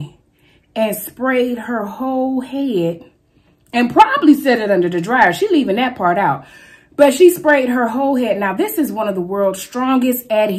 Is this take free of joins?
yes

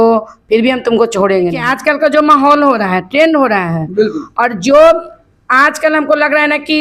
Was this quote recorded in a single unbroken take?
no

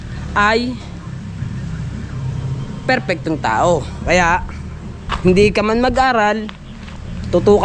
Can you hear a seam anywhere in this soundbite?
no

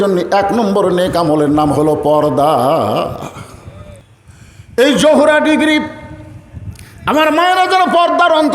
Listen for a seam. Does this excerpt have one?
yes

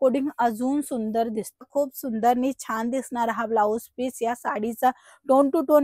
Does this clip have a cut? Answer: yes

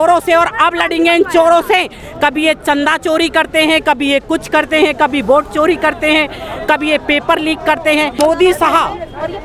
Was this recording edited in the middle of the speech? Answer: yes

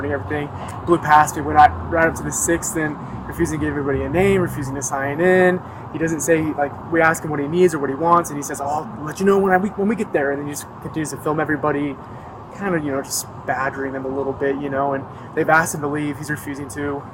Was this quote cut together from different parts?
no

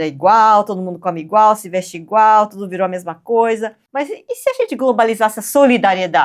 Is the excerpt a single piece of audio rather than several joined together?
no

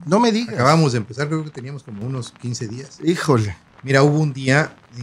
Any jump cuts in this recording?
yes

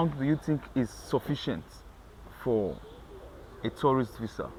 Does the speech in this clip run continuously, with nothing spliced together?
yes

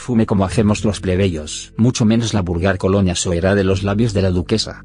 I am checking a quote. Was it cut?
yes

